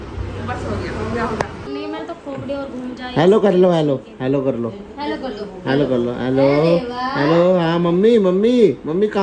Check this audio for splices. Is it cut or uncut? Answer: cut